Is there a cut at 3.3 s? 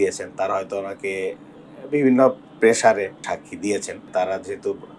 yes; 2 cuts; at 3.3 s, 4.0 s

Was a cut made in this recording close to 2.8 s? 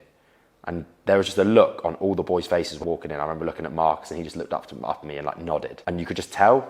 yes; 2 cuts; at 2.8 s, 5.7 s

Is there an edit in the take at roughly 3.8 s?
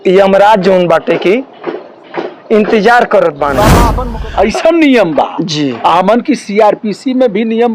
yes; 1 cut; at 3.8 s

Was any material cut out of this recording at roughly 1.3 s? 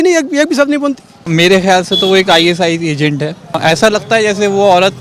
yes; 2 cuts; at 1.3 s, 3.6 s

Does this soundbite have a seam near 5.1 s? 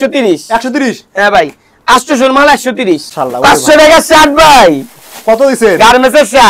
no; 1 cut; at 3.1 s

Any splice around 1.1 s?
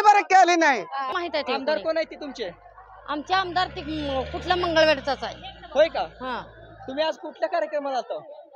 yes; 1 cut; at 1.1 s

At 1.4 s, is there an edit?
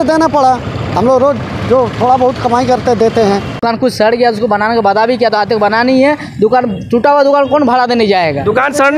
no; 1 cut; at 3.6 s

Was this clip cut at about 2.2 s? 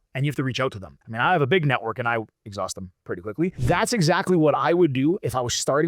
no; 2 cuts; at 1.0 s, 3.6 s

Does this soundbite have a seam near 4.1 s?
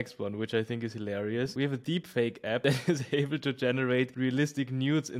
yes; 3 cuts; at 1.5 s, 2.6 s, 4.1 s

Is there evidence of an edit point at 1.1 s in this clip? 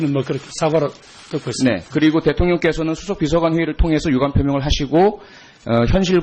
yes; 1 cut; at 1.1 s

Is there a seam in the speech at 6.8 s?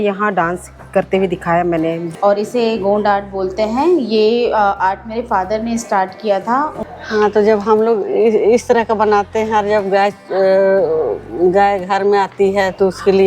yes; 2 cuts; at 2.0 s, 6.8 s

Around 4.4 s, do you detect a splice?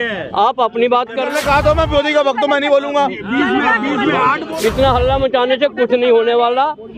yes; 2 cuts; at 1.3 s, 4.4 s

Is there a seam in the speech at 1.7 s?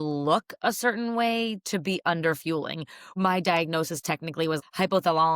no; 2 cuts; at 3.1 s, 4.6 s

